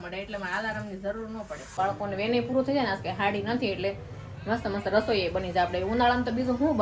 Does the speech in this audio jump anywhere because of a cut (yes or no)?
yes